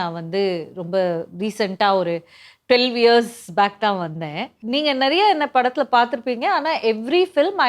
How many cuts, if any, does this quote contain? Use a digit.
1